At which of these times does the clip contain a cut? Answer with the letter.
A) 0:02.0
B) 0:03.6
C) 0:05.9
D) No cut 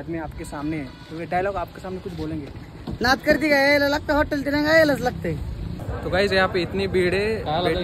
C